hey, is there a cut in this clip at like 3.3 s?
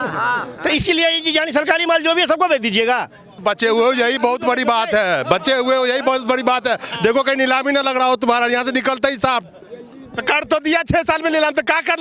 yes; 2 cuts; at 3.3 s, 9.7 s

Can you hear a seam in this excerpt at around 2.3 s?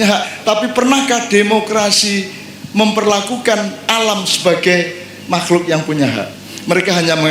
no; 0 cuts

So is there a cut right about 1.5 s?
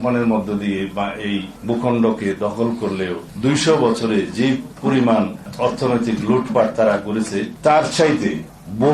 yes; 5 cuts; at 1.5 s, 3.2 s, 4.7 s, 5.5 s, 7.5 s

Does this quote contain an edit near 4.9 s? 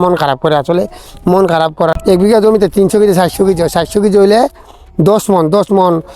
no; 1 cut; at 2.0 s

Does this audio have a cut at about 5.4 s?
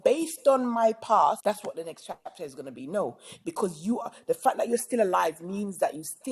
no; 1 cut; at 1.4 s

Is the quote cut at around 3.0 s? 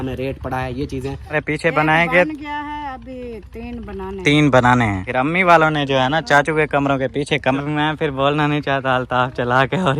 no; 3 cuts; at 1.3 s, 5.0 s, 7.6 s

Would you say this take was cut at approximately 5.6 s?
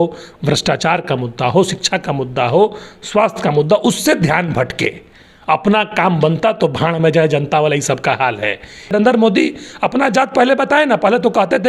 no; 1 cut; at 8.9 s

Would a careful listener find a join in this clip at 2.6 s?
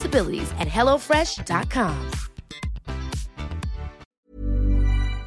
no; 1 cut; at 4.0 s

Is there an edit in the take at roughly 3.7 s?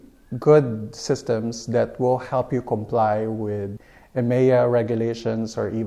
yes; 1 cut; at 3.7 s

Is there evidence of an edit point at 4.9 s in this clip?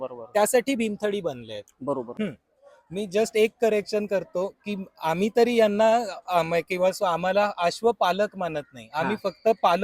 no; 1 cut; at 2.1 s

